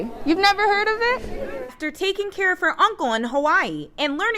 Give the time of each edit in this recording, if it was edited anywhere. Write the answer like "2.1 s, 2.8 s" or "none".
1.7 s